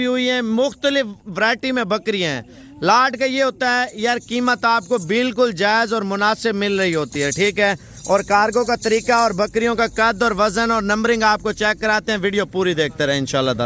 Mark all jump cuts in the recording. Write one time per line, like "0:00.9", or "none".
none